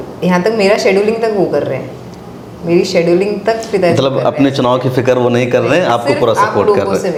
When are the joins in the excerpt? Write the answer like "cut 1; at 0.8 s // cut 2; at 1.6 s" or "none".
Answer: none